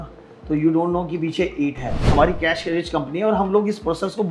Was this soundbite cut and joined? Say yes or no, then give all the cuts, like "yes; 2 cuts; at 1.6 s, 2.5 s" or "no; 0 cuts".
yes; 1 cut; at 2.0 s